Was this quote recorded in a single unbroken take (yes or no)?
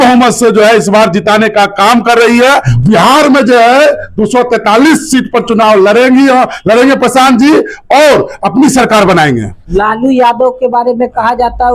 yes